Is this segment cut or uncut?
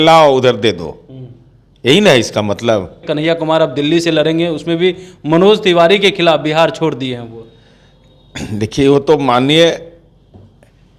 cut